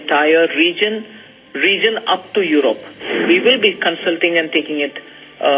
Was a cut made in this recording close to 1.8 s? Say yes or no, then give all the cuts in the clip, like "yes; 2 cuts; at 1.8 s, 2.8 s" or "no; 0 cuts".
no; 1 cut; at 3.0 s